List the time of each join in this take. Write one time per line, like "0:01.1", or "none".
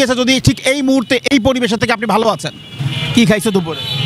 0:02.9